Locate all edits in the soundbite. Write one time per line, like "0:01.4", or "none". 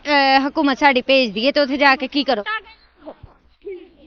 0:02.4

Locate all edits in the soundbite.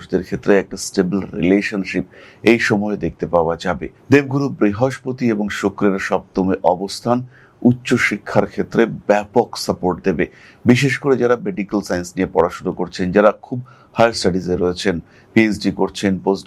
0:03.9

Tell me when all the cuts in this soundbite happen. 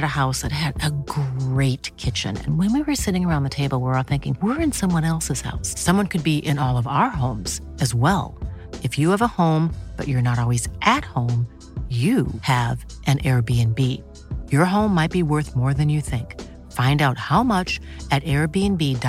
none

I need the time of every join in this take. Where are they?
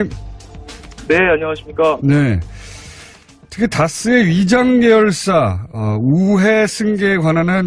none

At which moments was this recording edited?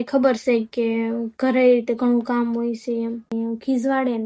0:03.3

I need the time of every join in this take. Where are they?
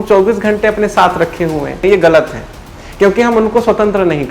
0:01.8

